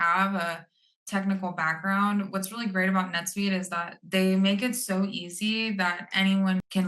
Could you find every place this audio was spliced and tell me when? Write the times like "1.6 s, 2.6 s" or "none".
none